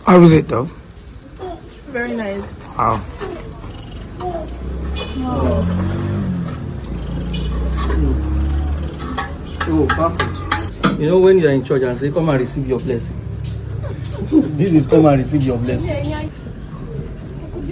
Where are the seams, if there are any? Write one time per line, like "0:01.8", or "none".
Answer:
0:10.7
0:16.3